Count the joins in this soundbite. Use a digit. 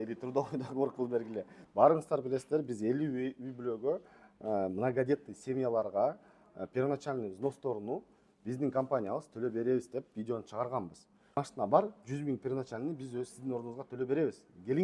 2